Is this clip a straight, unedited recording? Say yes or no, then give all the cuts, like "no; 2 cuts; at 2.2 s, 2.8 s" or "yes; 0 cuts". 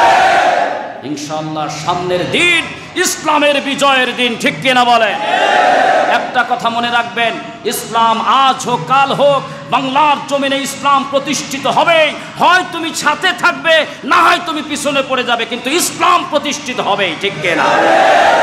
yes; 0 cuts